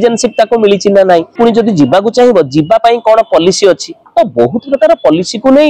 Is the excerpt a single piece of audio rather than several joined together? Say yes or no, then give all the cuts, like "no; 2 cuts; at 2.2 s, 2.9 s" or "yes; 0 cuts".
no; 1 cut; at 1.3 s